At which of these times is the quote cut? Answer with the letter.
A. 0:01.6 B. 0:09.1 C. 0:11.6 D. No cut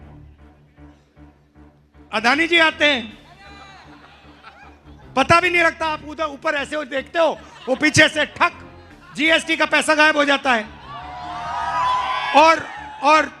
A